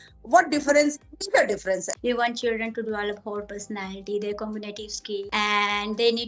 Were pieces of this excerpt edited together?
yes; 2 cuts; at 1.9 s, 5.3 s

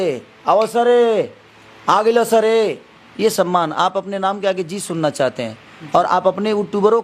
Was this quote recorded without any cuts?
yes; 0 cuts

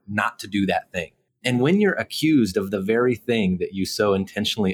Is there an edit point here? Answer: yes; 1 cut; at 1.2 s

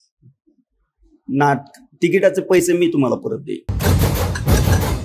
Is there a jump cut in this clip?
yes; 1 cut; at 3.7 s

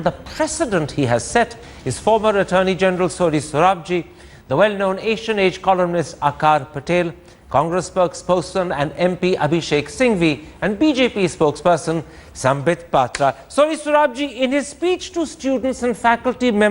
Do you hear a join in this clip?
yes; 1 cut; at 4.4 s

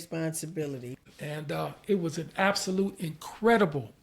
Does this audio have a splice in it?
yes; 1 cut; at 1.0 s

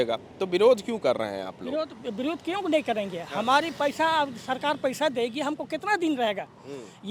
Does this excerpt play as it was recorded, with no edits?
yes; 0 cuts

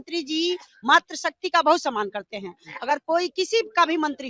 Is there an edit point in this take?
no; 0 cuts

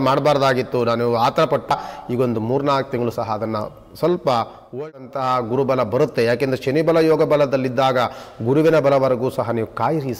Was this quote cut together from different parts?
yes; 2 cuts; at 1.8 s, 4.8 s

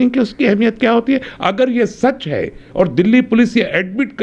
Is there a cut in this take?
no; 0 cuts

